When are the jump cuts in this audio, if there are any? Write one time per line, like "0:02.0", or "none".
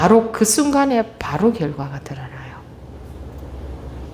none